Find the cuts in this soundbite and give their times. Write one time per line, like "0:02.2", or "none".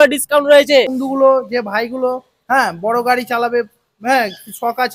0:01.0